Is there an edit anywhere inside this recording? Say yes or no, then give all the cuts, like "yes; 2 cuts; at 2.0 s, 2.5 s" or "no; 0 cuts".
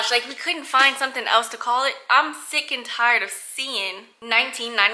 no; 0 cuts